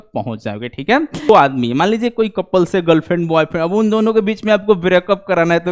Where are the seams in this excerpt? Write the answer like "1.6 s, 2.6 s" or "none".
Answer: 1.3 s